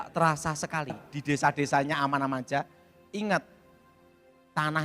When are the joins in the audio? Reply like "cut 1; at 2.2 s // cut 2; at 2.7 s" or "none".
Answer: cut 1; at 1.1 s